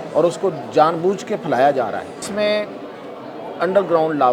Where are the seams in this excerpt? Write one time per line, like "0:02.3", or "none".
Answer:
0:02.3